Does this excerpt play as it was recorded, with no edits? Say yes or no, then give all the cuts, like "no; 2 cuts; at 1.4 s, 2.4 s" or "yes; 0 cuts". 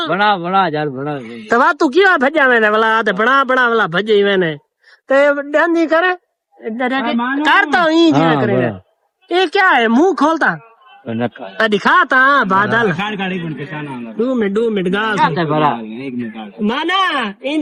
yes; 0 cuts